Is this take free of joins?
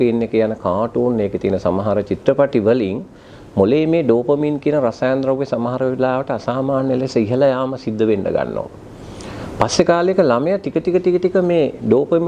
yes; 0 cuts

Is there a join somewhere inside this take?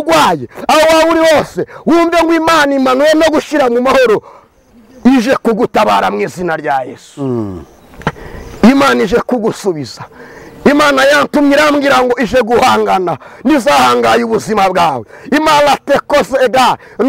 no; 0 cuts

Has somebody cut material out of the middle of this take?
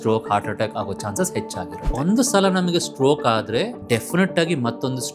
yes; 2 cuts; at 1.9 s, 3.8 s

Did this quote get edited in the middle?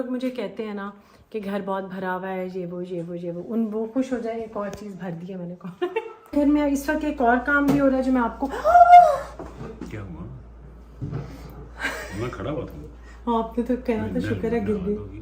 yes; 1 cut; at 6.3 s

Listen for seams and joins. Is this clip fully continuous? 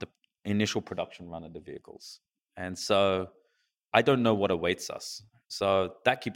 no; 1 cut; at 5.4 s

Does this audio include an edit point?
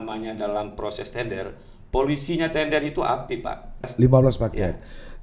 yes; 1 cut; at 3.9 s

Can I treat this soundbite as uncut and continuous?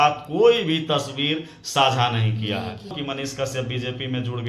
no; 1 cut; at 3.0 s

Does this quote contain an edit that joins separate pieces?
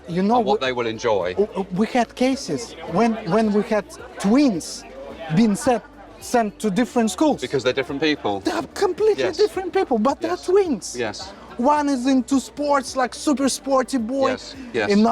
no; 0 cuts

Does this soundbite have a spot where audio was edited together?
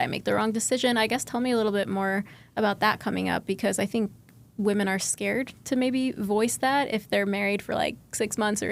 no; 0 cuts

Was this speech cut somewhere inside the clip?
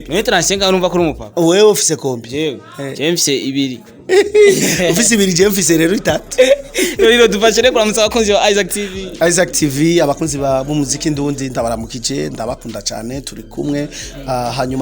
no; 0 cuts

